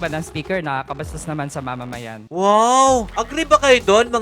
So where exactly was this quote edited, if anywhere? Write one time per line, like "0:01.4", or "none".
0:02.2
0:03.2

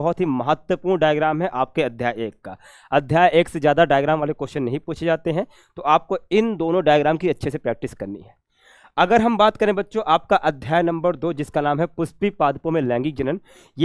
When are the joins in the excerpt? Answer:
none

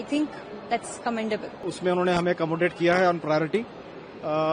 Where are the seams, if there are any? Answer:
0:01.6

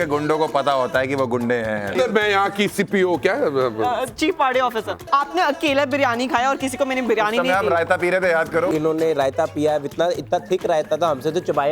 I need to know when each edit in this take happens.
0:02.0
0:05.1
0:08.7

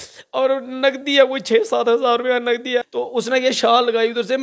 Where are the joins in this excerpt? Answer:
0:02.9

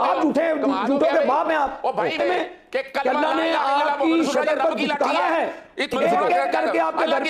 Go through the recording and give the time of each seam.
0:02.2
0:05.9

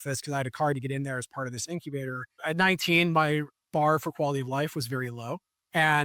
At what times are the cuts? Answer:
0:02.3

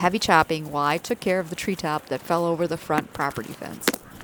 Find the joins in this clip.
none

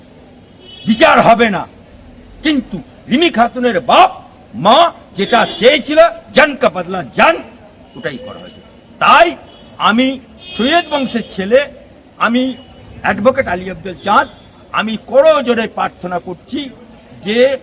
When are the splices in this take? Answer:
none

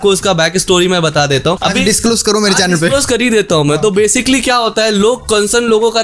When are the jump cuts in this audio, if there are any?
none

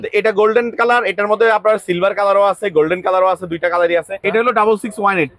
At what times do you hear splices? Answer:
0:04.1

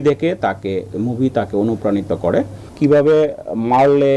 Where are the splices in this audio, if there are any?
0:02.7

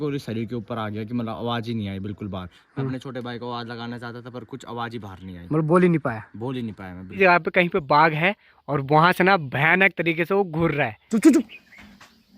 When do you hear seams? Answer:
0:07.2
0:11.0

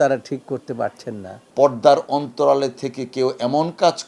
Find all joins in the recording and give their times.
0:01.4

